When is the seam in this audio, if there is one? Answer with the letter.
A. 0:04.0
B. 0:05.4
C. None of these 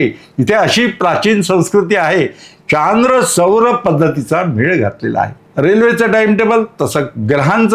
B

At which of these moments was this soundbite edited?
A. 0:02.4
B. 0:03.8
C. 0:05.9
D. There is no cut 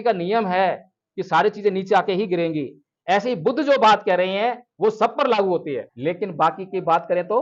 C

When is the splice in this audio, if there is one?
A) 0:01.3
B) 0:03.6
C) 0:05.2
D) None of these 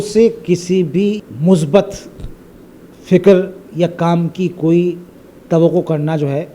A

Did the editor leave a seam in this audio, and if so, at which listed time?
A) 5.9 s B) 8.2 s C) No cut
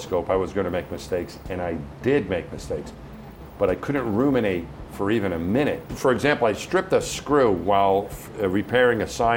A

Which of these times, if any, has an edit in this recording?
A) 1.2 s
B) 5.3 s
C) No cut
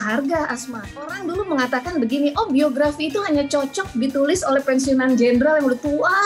A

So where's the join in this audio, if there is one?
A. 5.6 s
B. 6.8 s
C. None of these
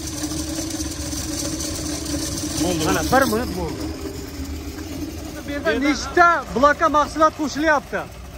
A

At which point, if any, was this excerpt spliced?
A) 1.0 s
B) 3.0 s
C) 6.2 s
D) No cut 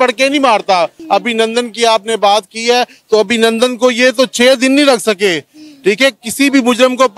A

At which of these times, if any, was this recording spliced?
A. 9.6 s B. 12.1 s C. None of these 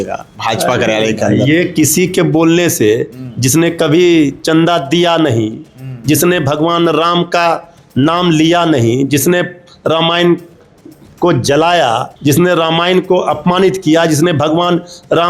B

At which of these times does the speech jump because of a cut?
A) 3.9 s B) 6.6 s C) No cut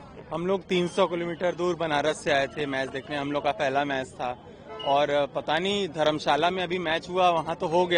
C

